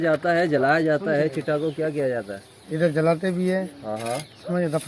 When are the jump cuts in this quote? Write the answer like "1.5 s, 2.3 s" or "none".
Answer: none